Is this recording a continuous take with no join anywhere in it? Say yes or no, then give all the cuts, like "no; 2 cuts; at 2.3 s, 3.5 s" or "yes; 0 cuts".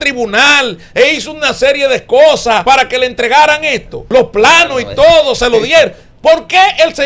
no; 2 cuts; at 2.6 s, 4.0 s